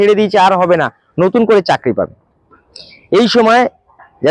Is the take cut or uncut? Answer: uncut